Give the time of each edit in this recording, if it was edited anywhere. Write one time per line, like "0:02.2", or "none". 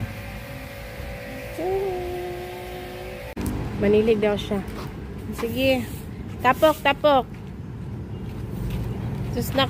0:03.7